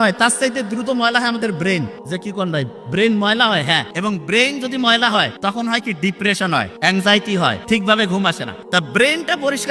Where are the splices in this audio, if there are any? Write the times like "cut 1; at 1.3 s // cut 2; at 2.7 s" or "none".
cut 1; at 2.0 s // cut 2; at 3.9 s // cut 3; at 5.3 s // cut 4; at 6.7 s // cut 5; at 7.6 s // cut 6; at 8.5 s